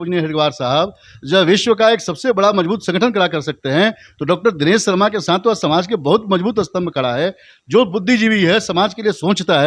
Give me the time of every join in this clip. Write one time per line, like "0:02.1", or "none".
none